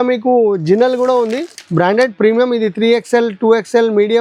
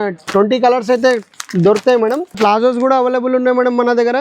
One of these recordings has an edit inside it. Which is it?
second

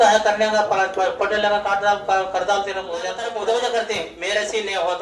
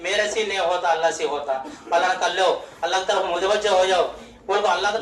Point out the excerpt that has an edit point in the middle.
first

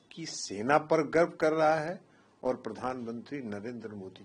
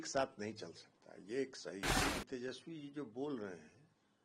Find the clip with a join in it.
second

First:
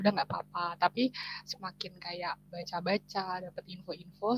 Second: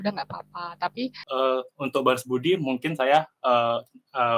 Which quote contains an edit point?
second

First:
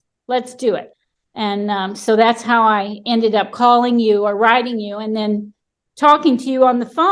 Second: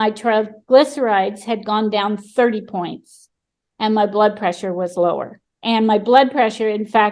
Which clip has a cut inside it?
first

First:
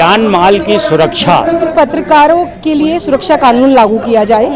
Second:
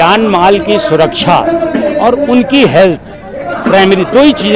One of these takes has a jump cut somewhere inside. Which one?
first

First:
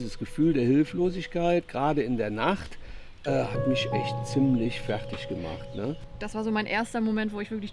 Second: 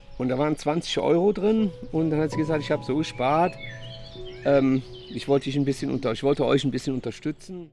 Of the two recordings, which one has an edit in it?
first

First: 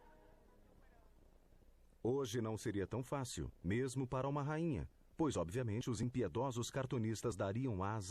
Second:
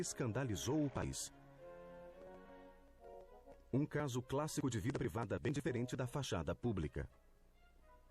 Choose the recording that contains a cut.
second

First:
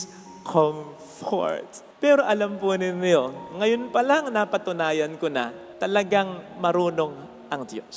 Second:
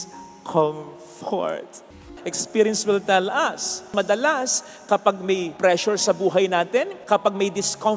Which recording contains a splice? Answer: second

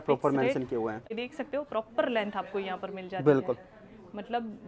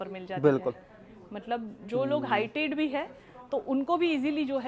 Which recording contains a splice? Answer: first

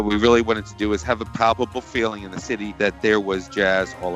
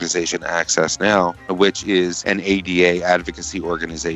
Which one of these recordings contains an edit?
second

